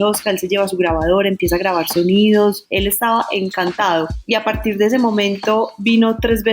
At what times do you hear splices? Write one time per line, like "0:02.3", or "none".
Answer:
0:02.7
0:04.2